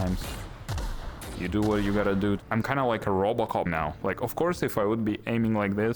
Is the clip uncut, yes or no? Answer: no